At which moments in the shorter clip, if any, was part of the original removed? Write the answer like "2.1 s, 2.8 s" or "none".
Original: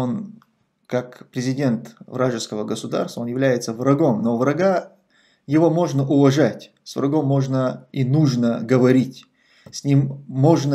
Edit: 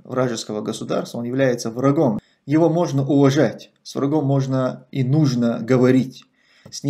2.2 s